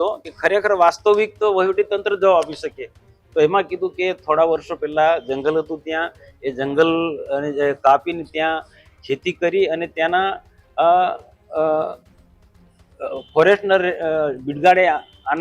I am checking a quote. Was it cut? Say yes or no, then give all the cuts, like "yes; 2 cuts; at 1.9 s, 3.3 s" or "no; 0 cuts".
no; 0 cuts